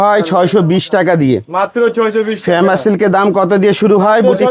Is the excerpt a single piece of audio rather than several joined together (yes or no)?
yes